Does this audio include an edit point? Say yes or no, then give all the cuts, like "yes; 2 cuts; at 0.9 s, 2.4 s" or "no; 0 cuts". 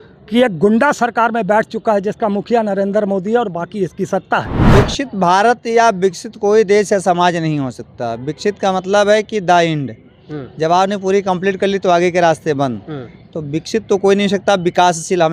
yes; 1 cut; at 4.5 s